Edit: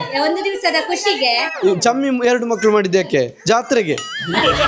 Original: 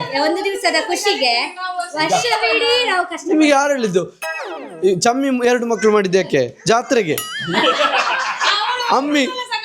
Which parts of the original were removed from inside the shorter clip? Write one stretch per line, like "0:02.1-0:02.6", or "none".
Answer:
0:01.5-0:04.7